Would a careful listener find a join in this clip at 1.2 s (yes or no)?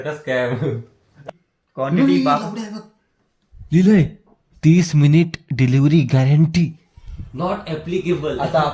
yes